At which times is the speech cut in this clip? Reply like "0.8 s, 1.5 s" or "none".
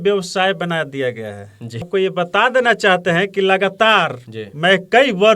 1.9 s